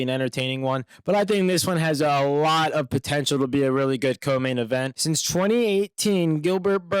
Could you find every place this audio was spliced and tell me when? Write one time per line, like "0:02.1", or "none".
0:04.9